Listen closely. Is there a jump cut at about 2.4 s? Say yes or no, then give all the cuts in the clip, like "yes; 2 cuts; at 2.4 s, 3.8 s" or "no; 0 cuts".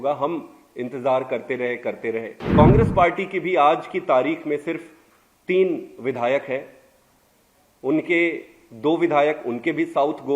yes; 1 cut; at 2.4 s